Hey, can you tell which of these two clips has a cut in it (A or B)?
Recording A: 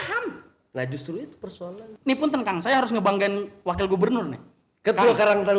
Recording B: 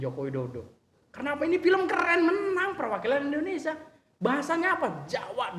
A